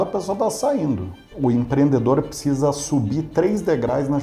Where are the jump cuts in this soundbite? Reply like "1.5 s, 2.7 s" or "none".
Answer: 1.3 s